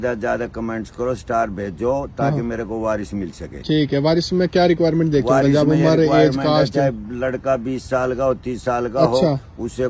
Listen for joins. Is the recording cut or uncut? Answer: uncut